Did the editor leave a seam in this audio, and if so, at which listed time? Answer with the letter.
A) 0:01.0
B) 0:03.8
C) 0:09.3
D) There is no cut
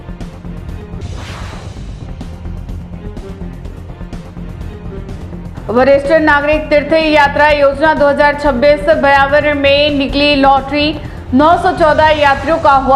A